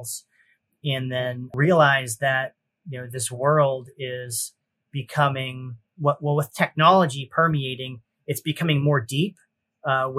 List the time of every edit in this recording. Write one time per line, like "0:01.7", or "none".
0:01.5